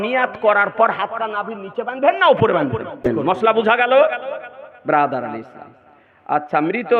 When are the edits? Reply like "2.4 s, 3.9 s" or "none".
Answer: 3.1 s